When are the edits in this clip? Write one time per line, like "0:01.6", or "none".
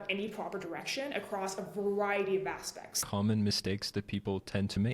0:03.0